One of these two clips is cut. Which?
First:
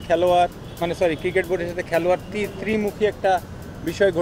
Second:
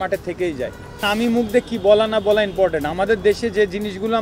second; 1 cut; at 1.0 s

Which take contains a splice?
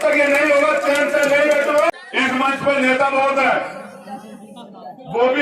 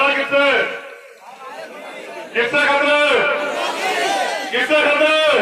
first; 1 cut; at 1.9 s

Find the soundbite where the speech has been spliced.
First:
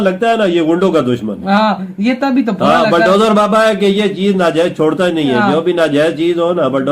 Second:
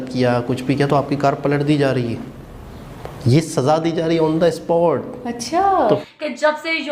second; 1 cut; at 6.0 s

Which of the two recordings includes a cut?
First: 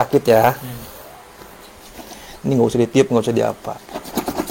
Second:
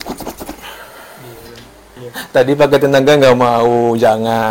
second; 1 cut; at 2.0 s

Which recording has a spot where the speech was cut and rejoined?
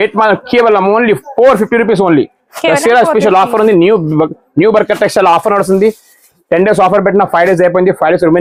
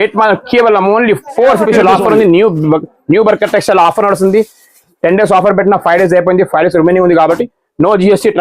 second; 1 cut; at 1.6 s

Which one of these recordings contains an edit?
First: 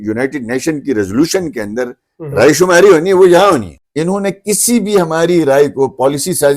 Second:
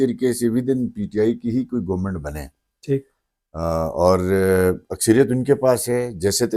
first; 1 cut; at 3.8 s

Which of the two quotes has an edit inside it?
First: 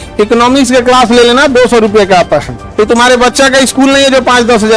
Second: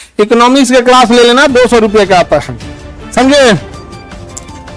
first; 1 cut; at 2.6 s

